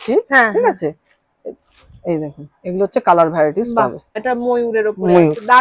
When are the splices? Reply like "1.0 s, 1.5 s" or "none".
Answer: 4.2 s